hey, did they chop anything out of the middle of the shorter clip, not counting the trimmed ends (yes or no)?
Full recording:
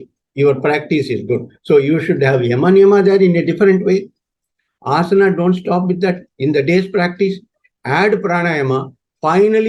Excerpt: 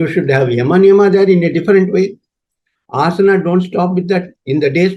no